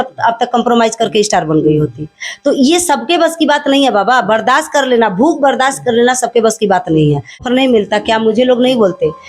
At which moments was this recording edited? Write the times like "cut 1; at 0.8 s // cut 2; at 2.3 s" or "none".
cut 1; at 7.4 s